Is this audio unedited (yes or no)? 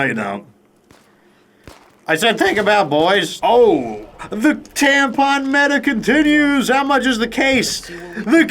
no